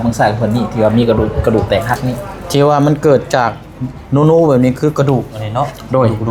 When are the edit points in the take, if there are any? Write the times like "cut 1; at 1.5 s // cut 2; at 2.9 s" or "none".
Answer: none